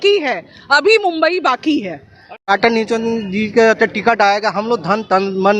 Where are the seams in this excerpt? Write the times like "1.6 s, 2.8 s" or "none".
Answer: 2.4 s